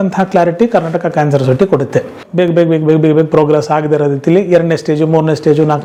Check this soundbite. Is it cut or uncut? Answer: uncut